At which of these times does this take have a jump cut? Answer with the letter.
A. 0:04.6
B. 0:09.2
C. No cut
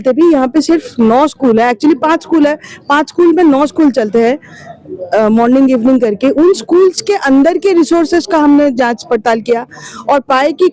C